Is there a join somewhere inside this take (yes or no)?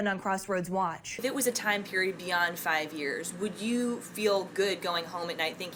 yes